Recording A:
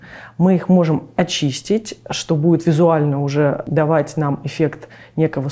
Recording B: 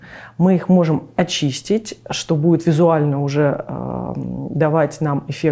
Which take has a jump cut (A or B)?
A